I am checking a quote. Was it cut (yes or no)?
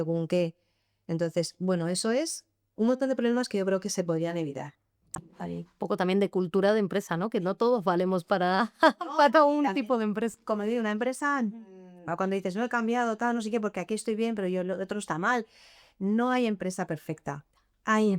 yes